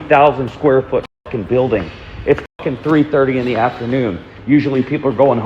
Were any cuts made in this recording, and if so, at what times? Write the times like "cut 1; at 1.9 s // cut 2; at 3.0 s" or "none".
none

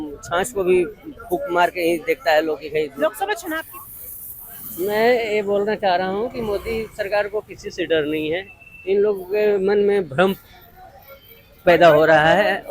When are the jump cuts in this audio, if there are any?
cut 1; at 3.5 s

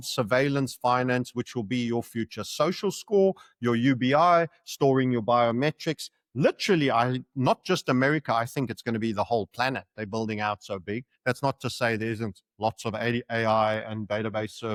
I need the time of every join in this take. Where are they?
none

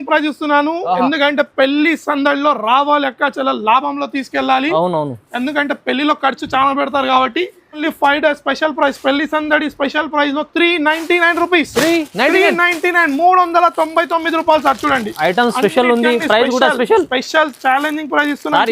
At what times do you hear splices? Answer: cut 1; at 7.8 s

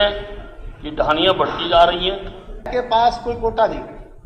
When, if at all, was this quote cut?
cut 1; at 2.7 s

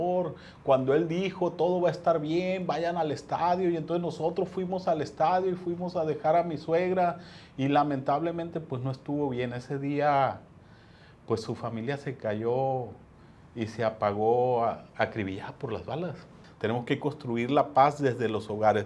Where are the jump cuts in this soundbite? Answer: cut 1; at 16.4 s

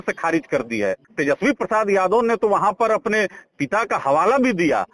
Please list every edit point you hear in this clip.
cut 1; at 1.1 s

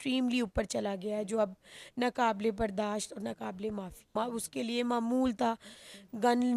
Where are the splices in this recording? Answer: cut 1; at 4.1 s

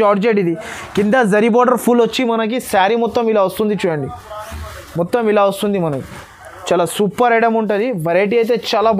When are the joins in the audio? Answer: none

